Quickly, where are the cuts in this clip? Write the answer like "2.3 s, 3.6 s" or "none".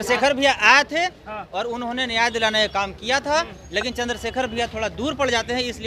none